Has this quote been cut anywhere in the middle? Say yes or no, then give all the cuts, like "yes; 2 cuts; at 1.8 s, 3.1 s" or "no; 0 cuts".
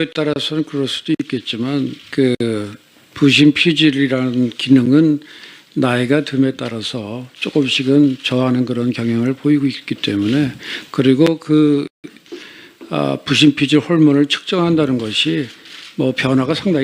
yes; 1 cut; at 10.7 s